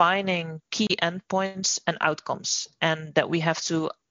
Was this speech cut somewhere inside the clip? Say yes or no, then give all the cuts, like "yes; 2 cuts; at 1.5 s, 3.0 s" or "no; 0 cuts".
no; 0 cuts